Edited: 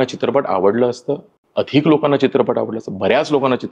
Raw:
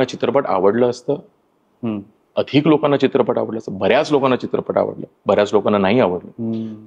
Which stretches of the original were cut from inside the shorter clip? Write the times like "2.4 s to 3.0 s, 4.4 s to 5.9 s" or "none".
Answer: 1.4 s to 2.2 s